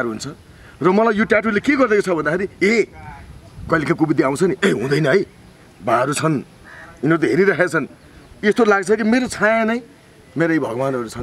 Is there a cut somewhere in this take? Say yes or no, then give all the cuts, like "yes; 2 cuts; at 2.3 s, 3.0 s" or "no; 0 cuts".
no; 0 cuts